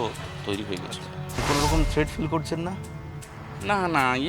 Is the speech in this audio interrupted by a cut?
yes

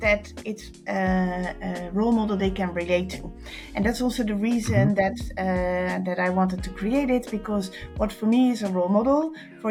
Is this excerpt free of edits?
yes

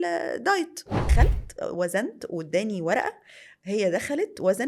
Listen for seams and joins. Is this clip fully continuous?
no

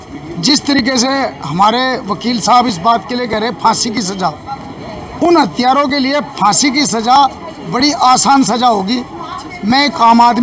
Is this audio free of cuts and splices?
yes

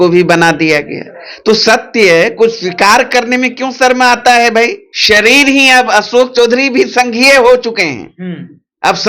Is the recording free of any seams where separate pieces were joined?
no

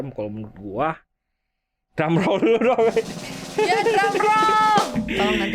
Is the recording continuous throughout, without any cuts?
yes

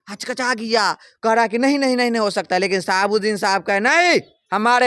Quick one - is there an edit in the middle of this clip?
no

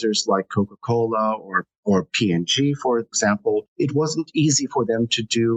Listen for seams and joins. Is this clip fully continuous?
no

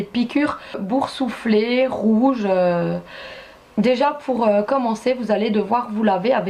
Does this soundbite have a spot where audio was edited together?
no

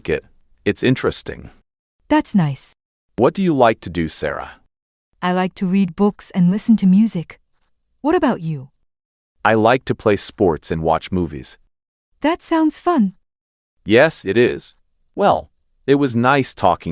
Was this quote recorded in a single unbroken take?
yes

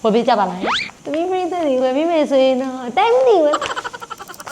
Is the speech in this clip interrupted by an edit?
yes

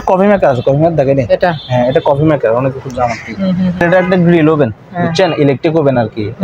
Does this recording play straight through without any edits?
no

